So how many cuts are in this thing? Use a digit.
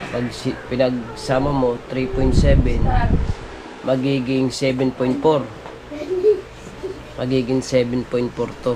0